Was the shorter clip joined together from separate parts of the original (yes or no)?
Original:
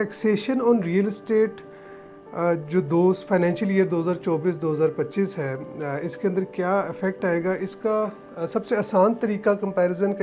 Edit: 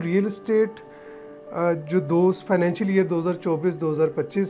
no